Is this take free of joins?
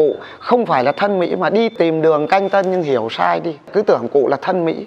no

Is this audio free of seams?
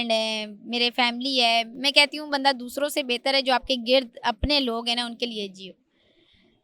yes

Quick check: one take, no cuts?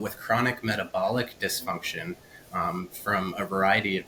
yes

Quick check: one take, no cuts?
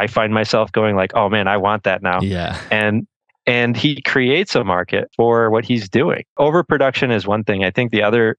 no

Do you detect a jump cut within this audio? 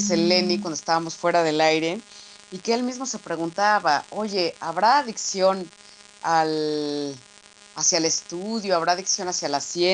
yes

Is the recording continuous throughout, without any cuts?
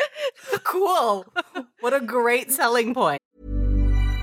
no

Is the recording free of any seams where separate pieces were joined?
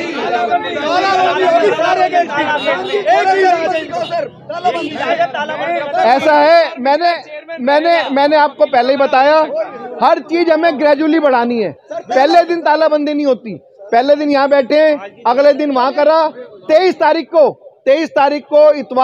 yes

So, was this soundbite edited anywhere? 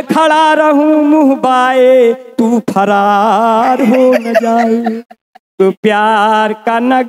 yes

